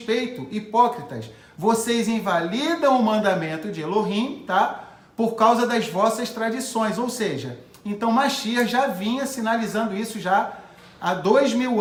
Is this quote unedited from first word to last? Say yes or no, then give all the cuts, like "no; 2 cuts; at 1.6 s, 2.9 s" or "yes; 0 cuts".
yes; 0 cuts